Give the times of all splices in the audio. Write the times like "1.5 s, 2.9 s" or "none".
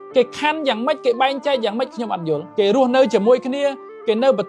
2.5 s